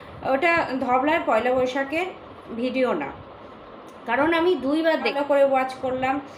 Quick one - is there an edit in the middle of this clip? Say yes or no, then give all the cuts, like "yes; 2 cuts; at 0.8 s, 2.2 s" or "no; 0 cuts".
yes; 1 cut; at 5.1 s